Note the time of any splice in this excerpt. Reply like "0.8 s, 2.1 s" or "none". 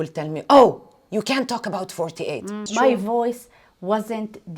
2.6 s